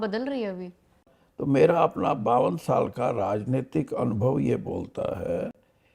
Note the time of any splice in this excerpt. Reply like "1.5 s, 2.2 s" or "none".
1.1 s